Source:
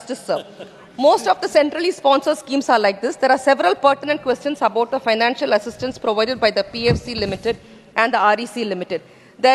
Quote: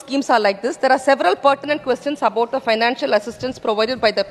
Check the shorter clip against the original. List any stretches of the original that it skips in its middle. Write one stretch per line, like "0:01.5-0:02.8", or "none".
none